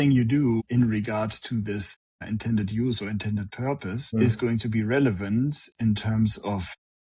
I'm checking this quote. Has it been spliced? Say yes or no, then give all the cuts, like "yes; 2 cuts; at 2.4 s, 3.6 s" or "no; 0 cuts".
no; 0 cuts